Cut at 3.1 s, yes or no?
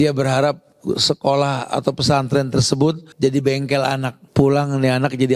yes